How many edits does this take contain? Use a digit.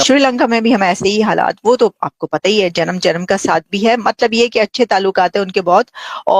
0